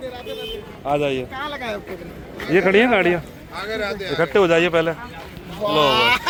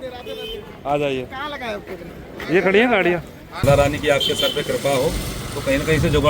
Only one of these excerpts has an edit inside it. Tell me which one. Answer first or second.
second